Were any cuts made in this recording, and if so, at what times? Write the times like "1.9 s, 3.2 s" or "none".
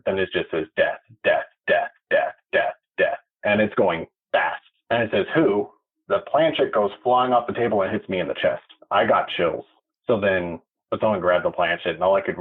8.7 s, 9.8 s, 10.7 s